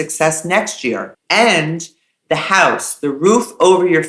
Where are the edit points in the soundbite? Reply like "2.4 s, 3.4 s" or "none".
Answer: 1.1 s